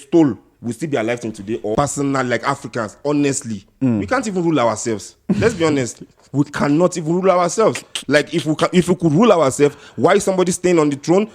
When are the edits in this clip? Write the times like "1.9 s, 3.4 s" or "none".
1.8 s